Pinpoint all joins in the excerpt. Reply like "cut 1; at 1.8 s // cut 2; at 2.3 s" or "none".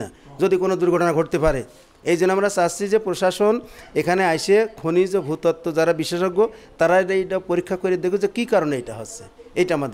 none